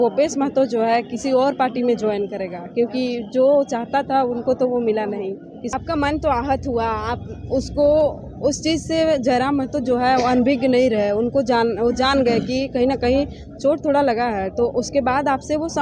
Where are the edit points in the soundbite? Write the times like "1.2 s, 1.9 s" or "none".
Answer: 5.6 s